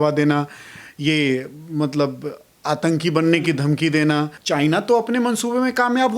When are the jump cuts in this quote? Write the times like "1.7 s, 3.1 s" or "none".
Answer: 4.4 s